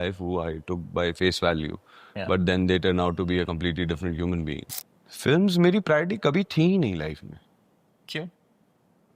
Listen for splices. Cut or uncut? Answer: cut